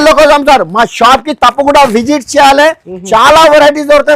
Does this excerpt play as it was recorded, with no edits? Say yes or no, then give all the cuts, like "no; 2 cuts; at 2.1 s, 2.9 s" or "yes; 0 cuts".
yes; 0 cuts